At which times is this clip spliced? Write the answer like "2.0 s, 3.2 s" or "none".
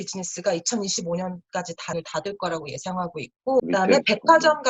3.6 s